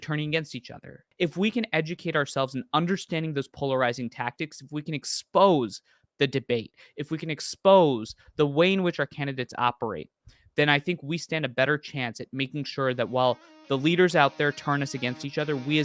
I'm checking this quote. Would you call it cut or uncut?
cut